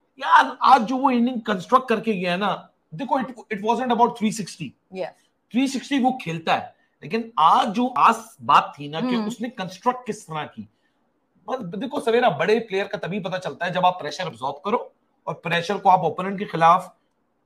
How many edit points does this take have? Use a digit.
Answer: 0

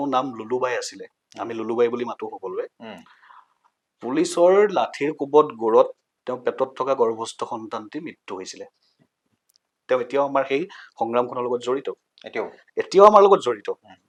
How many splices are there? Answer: 0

